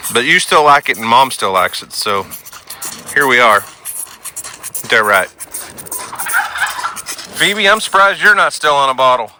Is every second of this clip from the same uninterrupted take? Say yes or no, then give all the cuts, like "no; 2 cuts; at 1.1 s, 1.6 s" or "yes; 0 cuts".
yes; 0 cuts